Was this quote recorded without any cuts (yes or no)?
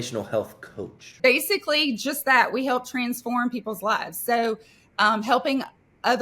no